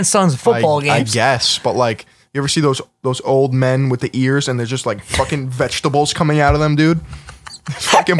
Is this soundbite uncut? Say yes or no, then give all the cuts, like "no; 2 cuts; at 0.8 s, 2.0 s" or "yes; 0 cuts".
yes; 0 cuts